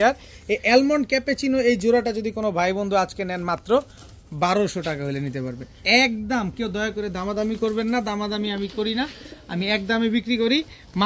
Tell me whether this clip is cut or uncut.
uncut